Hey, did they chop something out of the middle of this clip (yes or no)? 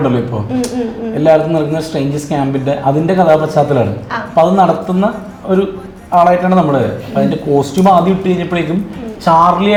no